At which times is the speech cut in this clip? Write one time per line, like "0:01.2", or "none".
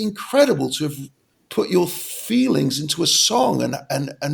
none